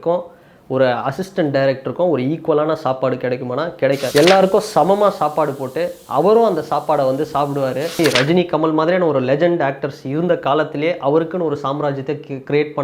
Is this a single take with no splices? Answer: no; 2 cuts; at 4.1 s, 7.9 s

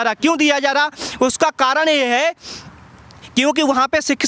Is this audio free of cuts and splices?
yes; 0 cuts

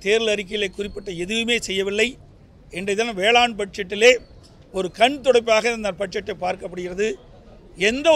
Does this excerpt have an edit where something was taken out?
no; 0 cuts

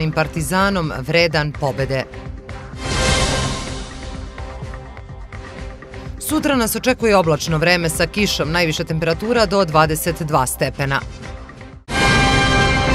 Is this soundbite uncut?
no; 1 cut; at 11.9 s

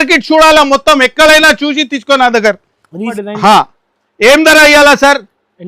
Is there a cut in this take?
yes; 1 cut; at 3.2 s

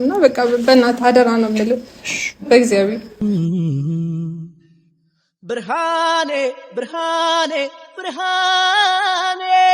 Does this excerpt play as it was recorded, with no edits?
no; 1 cut; at 3.1 s

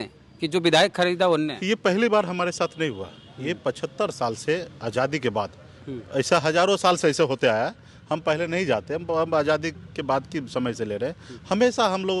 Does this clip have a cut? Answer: no; 0 cuts

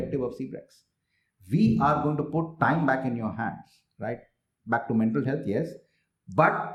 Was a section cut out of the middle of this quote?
no; 0 cuts

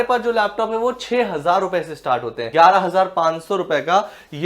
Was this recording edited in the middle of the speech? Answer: yes; 1 cut; at 2.4 s

